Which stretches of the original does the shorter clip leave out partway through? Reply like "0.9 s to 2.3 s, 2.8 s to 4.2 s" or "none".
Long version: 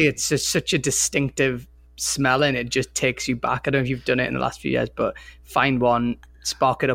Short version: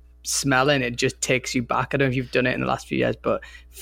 none